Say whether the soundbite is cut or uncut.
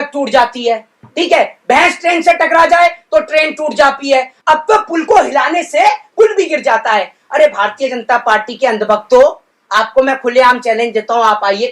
cut